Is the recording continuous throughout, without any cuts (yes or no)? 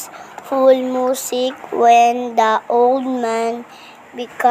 no